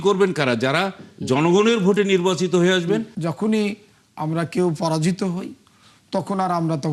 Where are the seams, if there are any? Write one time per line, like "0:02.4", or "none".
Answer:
0:03.2